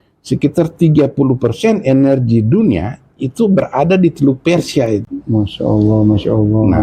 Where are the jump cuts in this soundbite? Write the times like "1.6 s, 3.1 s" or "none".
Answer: 5.1 s